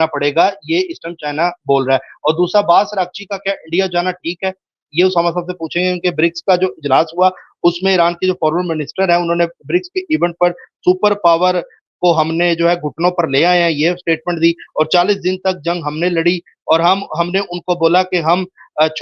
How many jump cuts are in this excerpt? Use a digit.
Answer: 0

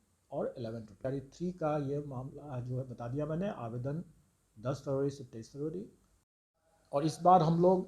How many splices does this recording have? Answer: 2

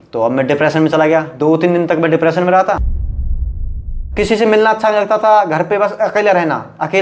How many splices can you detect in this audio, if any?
1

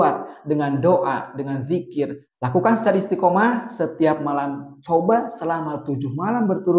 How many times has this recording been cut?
1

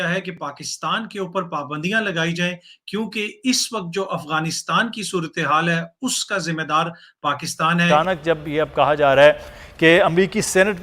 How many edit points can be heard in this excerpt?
1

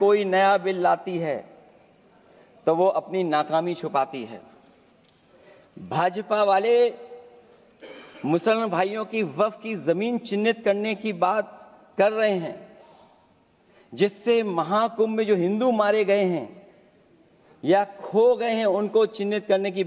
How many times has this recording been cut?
0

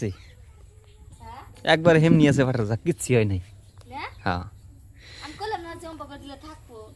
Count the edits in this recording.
1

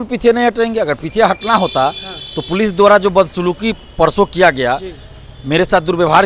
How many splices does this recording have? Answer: 0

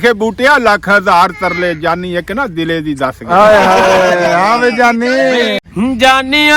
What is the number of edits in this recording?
1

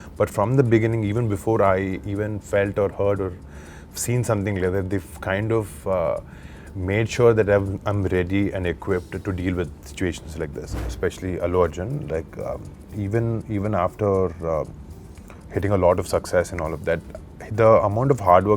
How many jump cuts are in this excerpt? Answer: 1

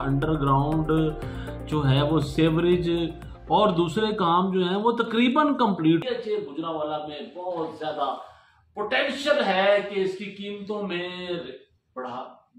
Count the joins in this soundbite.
1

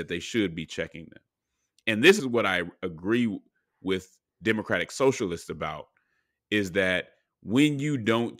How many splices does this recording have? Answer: 1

